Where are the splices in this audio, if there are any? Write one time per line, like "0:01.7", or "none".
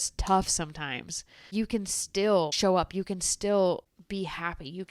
0:01.4
0:02.5
0:03.9